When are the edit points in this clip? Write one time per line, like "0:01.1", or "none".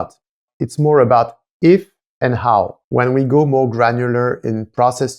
0:02.8